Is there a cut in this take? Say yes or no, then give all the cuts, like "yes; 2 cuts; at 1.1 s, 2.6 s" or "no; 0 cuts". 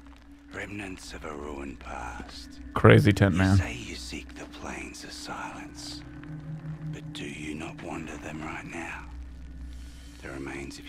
no; 0 cuts